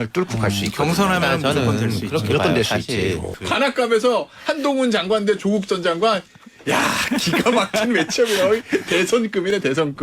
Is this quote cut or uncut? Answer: cut